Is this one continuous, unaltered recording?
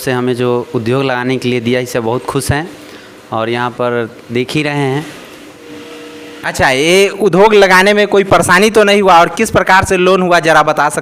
yes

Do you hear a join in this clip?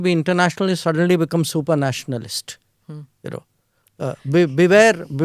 no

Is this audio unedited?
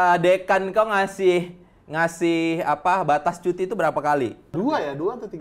no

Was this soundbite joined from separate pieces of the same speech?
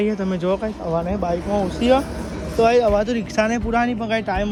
no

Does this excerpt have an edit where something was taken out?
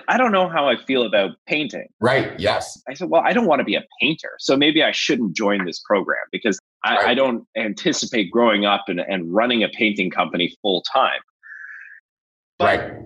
yes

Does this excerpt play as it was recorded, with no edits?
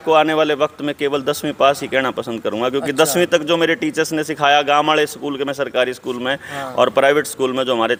yes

